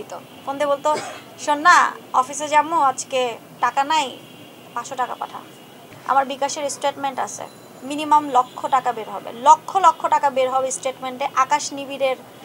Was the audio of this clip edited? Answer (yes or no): yes